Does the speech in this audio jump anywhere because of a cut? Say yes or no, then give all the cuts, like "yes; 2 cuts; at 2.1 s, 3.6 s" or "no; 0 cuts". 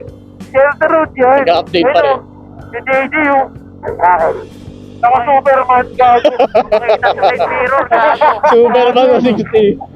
no; 0 cuts